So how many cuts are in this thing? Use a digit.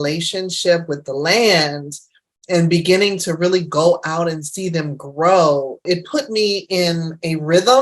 1